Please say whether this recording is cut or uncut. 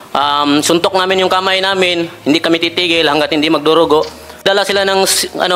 cut